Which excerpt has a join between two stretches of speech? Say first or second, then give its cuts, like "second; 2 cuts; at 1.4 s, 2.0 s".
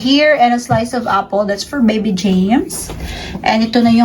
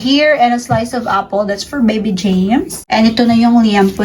second; 1 cut; at 2.8 s